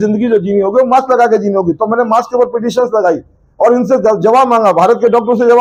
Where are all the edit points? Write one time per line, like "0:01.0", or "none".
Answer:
none